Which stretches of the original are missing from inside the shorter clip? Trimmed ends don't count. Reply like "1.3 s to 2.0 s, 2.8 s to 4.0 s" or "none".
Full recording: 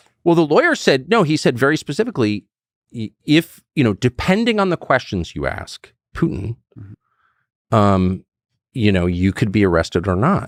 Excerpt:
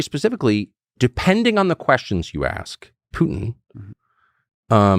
2.7 s to 4.0 s